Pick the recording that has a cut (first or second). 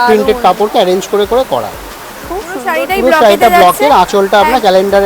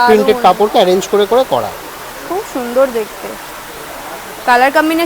first